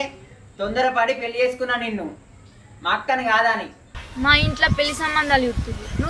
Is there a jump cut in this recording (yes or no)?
yes